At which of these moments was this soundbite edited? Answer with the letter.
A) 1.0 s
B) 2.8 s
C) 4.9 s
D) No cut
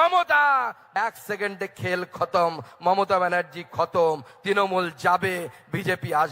A